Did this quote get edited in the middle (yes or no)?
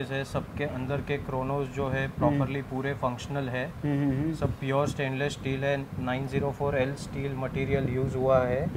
no